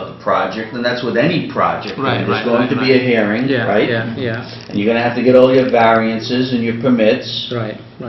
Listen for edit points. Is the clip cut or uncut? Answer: cut